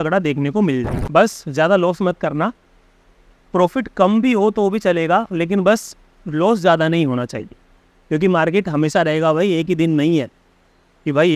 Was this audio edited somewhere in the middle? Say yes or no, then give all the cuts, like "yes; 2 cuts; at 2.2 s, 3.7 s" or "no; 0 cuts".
yes; 1 cut; at 1.0 s